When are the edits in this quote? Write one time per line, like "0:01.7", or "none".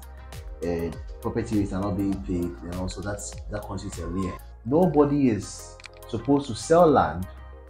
0:04.5